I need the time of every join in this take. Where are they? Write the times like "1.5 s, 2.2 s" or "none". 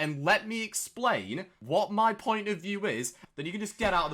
1.6 s, 3.2 s